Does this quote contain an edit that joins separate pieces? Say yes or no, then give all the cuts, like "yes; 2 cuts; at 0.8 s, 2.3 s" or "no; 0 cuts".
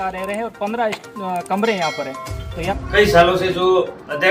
yes; 1 cut; at 2.5 s